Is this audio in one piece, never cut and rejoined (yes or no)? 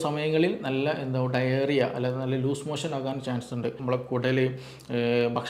no